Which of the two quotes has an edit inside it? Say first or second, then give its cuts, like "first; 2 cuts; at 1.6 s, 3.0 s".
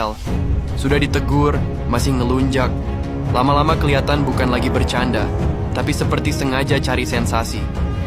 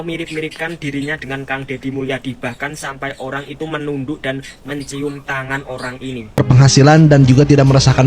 second; 1 cut; at 6.4 s